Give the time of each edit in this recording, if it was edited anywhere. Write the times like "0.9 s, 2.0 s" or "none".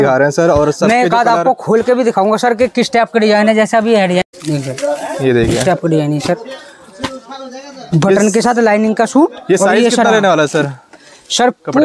none

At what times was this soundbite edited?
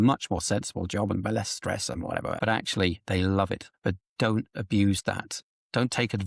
2.4 s, 3.7 s, 5.4 s

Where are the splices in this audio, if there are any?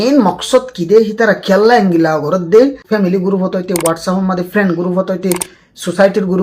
2.8 s

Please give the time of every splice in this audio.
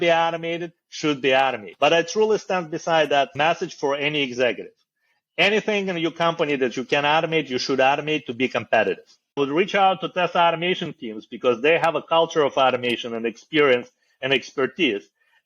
1.7 s, 3.3 s, 9.4 s

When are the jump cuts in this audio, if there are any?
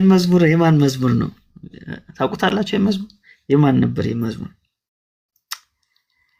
none

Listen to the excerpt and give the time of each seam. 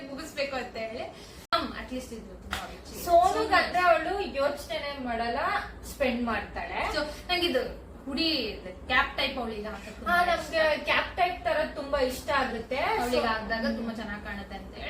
1.5 s

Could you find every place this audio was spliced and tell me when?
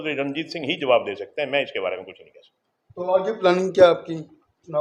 none

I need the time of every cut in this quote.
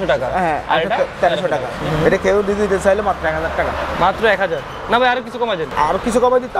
1.7 s, 5.7 s

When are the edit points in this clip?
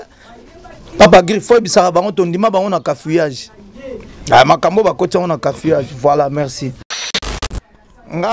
7.4 s

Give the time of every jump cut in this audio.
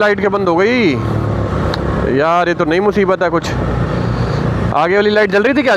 none

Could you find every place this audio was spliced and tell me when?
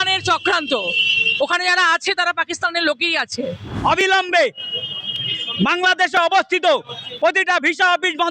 3.7 s

